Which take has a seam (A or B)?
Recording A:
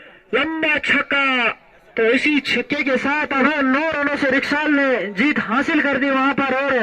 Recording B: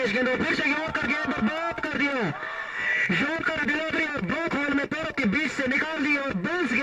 A